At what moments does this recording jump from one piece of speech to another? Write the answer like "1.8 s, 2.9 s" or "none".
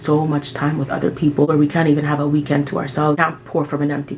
1.5 s, 3.2 s